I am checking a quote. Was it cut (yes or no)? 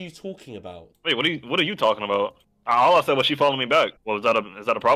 yes